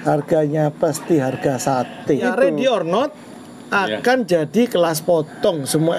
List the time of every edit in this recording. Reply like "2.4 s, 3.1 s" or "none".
2.2 s